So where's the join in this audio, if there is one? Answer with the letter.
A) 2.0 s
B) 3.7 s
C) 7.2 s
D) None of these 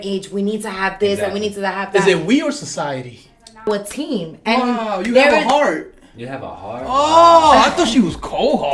B